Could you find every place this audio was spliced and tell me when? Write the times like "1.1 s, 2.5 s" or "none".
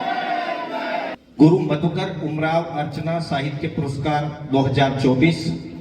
1.2 s

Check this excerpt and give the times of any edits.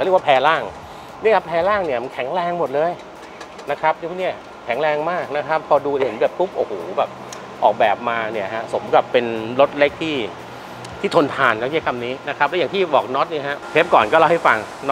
none

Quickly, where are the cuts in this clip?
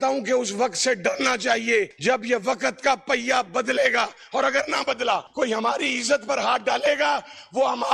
1.9 s, 5.3 s

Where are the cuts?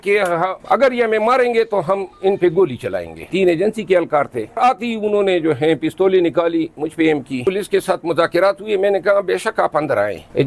3.3 s, 4.6 s, 7.5 s

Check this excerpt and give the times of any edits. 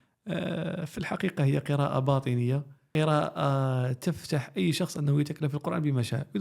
2.8 s

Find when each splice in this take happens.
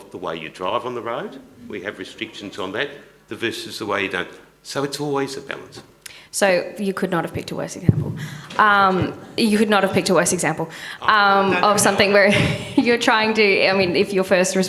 none

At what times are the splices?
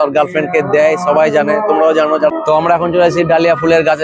2.3 s

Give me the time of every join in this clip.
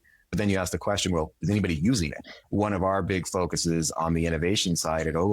2.3 s

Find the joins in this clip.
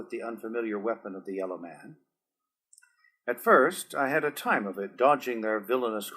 4.4 s

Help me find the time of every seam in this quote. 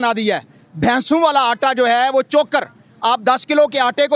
none

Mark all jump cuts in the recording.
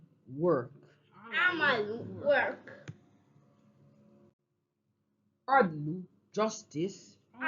5.8 s

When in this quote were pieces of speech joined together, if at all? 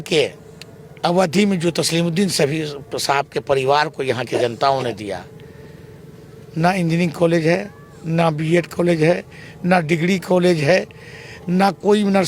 none

